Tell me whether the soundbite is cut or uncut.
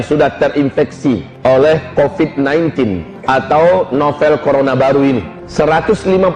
cut